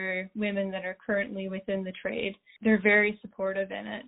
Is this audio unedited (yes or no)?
yes